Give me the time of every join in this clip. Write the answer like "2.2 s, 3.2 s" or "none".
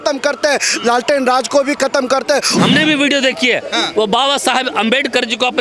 2.6 s